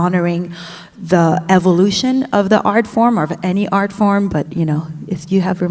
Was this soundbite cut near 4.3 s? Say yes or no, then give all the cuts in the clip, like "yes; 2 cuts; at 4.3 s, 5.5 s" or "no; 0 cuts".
yes; 1 cut; at 4.3 s